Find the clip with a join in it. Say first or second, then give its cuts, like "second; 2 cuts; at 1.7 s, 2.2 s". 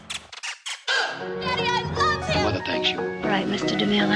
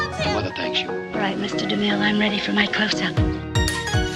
first; 1 cut; at 1.2 s